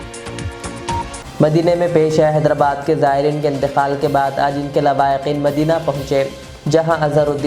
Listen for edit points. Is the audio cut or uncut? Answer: cut